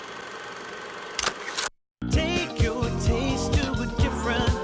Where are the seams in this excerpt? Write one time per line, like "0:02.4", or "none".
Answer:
0:01.8